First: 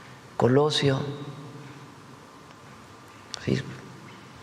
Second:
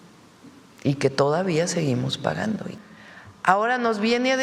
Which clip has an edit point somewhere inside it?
second; 1 cut; at 2.7 s

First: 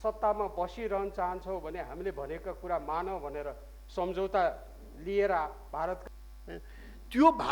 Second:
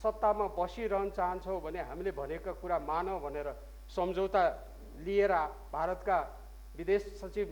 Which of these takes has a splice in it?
first; 1 cut; at 6.0 s

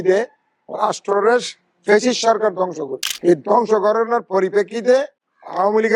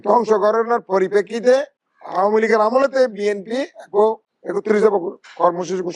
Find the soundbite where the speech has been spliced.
second; 1 cut; at 4.6 s

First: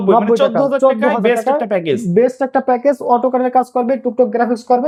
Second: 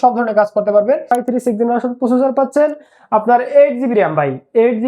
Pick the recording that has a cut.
second; 1 cut; at 1.1 s

